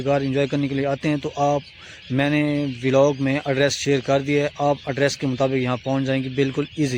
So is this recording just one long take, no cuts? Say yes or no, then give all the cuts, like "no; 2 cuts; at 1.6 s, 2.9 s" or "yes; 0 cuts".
yes; 0 cuts